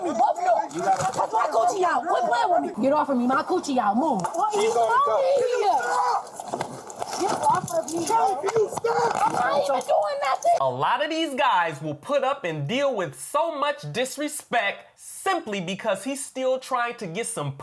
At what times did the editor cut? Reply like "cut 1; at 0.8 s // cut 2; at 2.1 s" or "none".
cut 1; at 2.7 s // cut 2; at 4.3 s // cut 3; at 10.6 s